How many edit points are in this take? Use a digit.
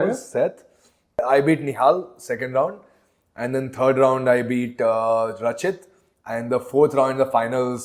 1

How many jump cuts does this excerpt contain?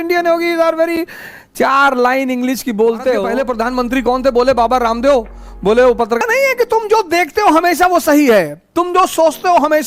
2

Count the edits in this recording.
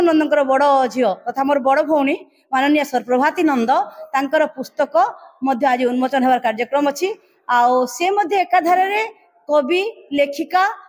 0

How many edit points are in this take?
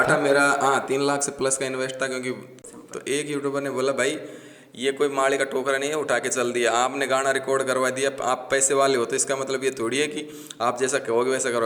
1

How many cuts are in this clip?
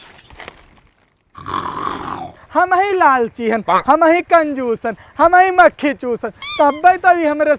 1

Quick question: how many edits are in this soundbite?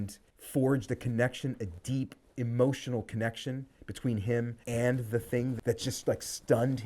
1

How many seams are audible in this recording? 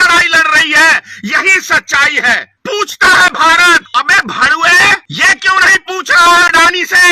3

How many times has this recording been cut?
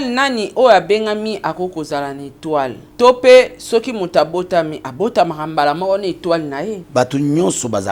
2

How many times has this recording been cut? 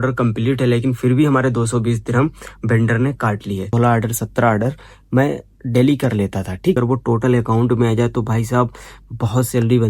2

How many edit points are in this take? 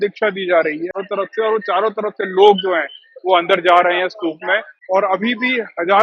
2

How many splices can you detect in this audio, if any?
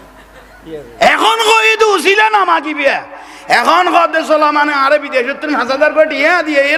0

